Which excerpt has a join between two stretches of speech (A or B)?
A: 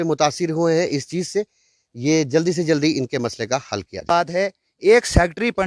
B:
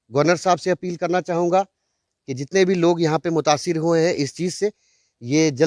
A